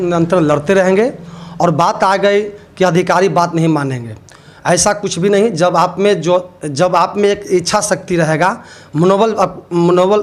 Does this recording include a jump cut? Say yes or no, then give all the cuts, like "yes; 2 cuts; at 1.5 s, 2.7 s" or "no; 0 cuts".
no; 0 cuts